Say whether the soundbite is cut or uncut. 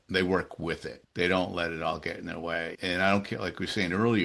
cut